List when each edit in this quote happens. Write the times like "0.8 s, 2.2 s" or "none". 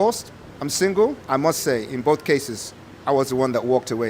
1.2 s